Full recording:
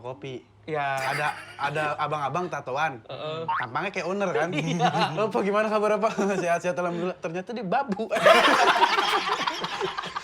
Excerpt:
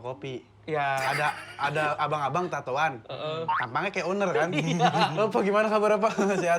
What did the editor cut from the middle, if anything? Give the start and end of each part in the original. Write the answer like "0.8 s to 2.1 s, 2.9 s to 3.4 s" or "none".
none